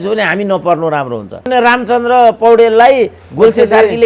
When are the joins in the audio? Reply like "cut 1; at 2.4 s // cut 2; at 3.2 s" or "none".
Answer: cut 1; at 1.5 s